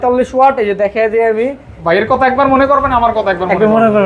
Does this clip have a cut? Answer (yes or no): yes